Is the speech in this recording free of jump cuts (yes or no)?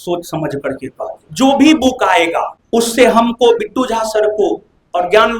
no